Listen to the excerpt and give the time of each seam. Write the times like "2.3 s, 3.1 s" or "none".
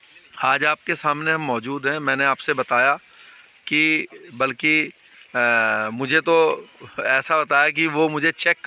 none